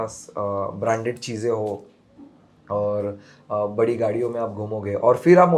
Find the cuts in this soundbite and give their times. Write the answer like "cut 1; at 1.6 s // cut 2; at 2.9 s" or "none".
none